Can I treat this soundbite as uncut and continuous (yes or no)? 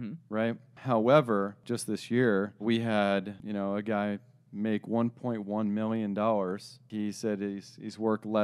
no